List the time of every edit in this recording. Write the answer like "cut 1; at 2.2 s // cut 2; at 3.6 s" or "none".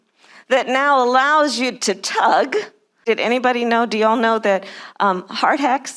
cut 1; at 2.9 s